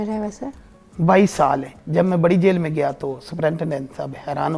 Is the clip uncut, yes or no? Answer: no